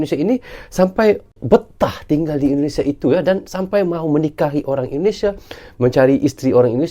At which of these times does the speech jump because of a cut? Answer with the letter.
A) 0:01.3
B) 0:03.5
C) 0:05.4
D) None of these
A